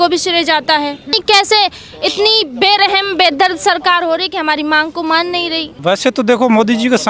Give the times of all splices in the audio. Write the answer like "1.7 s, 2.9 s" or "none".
1.2 s, 5.7 s